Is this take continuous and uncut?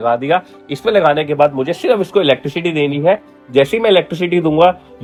yes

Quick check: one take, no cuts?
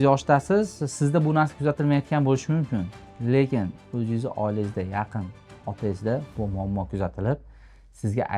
yes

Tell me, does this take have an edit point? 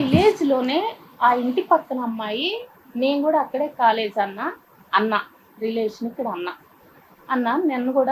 no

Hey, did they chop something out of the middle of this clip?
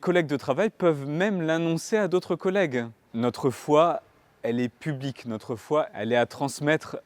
yes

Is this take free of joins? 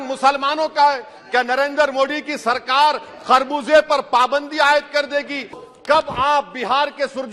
no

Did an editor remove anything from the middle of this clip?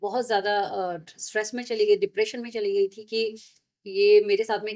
no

